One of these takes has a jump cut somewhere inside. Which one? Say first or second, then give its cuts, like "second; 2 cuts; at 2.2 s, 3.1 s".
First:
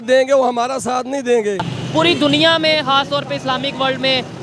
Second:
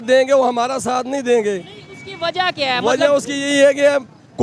first; 1 cut; at 1.8 s